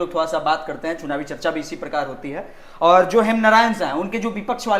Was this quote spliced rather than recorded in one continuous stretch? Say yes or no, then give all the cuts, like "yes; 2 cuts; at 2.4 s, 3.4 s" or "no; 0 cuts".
no; 0 cuts